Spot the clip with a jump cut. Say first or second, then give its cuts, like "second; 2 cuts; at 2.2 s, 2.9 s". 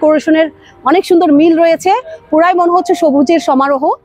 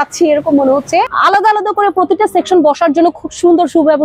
second; 1 cut; at 1.1 s